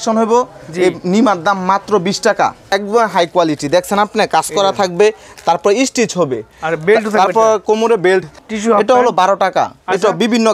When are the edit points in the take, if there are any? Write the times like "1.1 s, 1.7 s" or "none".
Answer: 2.7 s, 8.4 s

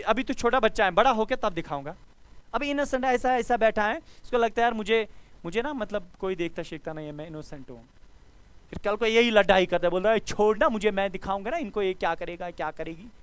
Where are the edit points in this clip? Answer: none

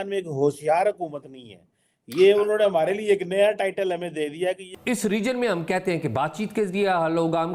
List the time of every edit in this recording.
4.7 s

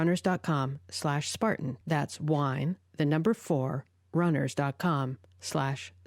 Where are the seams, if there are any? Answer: 1.8 s

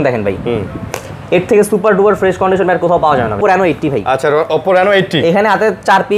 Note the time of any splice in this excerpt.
3.4 s

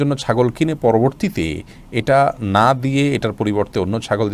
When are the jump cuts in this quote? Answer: none

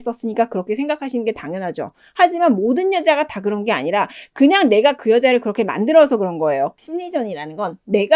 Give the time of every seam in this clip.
6.8 s

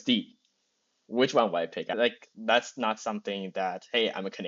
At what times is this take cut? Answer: 1.9 s

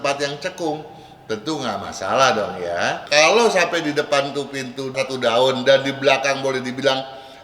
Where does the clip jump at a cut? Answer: 3.0 s

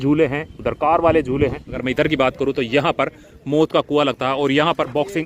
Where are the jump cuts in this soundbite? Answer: 1.8 s

